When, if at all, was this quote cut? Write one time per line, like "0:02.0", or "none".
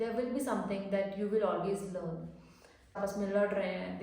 0:03.0